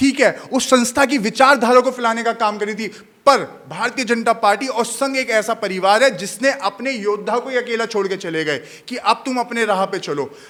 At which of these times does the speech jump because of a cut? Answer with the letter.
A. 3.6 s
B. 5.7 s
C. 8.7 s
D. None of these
D